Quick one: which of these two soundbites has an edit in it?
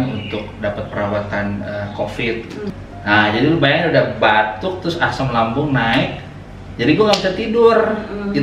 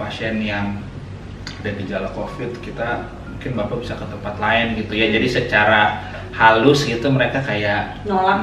first; 1 cut; at 2.7 s

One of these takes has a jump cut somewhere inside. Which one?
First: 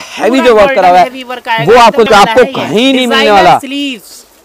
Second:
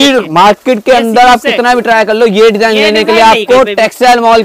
first; 1 cut; at 2.1 s

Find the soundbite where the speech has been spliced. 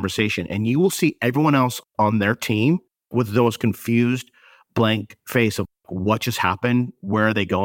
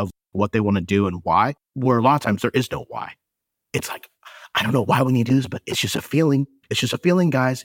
second; 1 cut; at 1.6 s

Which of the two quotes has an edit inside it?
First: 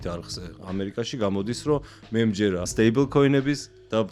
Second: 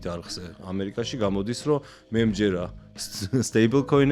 first; 1 cut; at 2.7 s

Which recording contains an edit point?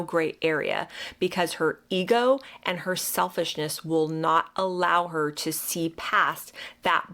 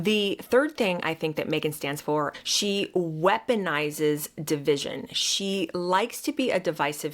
second; 1 cut; at 2.4 s

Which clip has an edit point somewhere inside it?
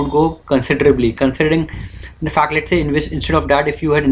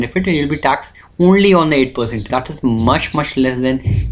second; 1 cut; at 2.2 s

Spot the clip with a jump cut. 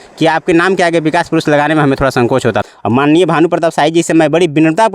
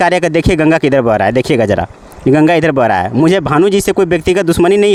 first; 1 cut; at 2.6 s

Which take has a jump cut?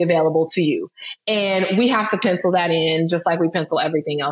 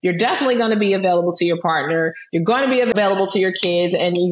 second; 1 cut; at 2.9 s

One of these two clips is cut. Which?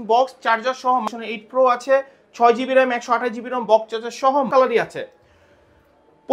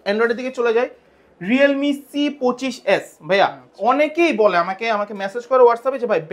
first; 2 cuts; at 1.0 s, 4.5 s

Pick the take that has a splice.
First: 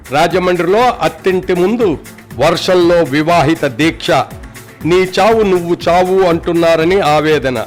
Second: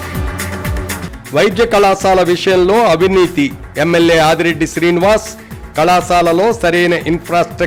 second; 1 cut; at 1.0 s

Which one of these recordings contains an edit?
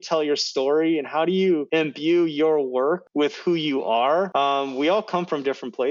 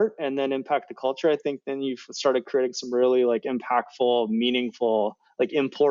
first; 3 cuts; at 1.7 s, 3.1 s, 4.3 s

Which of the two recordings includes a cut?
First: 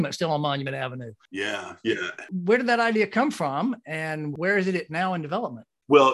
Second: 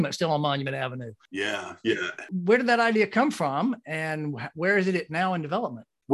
first; 1 cut; at 4.3 s

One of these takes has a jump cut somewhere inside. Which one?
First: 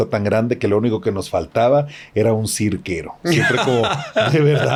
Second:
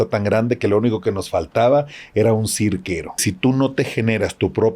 second; 1 cut; at 3.2 s

